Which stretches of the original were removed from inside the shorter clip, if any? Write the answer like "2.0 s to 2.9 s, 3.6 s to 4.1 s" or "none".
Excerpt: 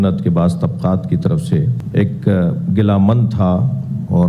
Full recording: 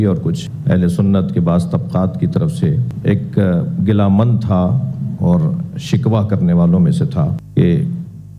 none